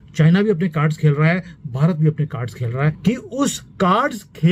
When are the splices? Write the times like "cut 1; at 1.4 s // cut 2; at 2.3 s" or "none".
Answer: cut 1; at 3.0 s